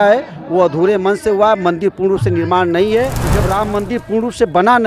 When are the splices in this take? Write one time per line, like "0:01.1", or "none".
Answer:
0:03.3